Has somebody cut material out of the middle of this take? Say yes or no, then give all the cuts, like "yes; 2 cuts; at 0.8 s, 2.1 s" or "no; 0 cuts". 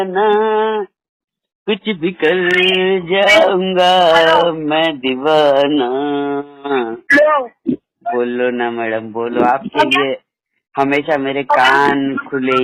no; 0 cuts